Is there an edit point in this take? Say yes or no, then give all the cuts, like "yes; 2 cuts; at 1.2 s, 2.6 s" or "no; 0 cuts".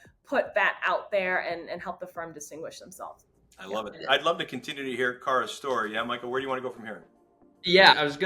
yes; 1 cut; at 4.0 s